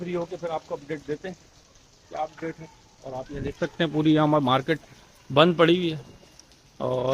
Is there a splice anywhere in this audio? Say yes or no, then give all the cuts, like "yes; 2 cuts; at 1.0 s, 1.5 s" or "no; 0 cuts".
no; 0 cuts